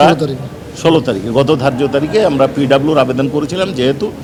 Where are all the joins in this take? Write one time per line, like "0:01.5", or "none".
none